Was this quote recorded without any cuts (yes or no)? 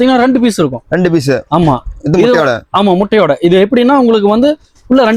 yes